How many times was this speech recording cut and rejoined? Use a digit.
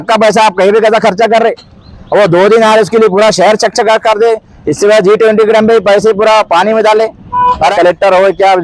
1